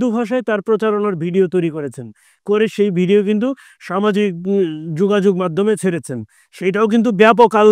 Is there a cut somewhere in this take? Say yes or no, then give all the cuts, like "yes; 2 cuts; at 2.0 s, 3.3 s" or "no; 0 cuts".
no; 0 cuts